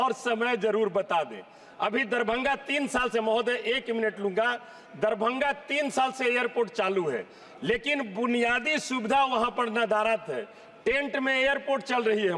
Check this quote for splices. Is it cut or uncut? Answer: uncut